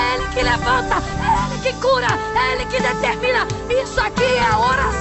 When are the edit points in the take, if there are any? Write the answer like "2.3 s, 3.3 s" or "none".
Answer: none